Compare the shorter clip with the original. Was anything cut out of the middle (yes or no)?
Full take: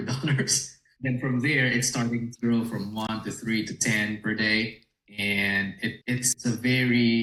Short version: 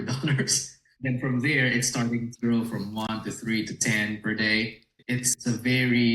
yes